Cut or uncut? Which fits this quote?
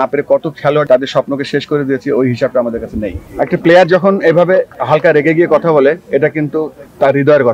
cut